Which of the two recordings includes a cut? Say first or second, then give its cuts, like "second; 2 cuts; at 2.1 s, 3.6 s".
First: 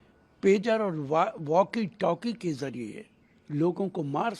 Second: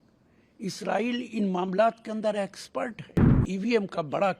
second; 1 cut; at 3.4 s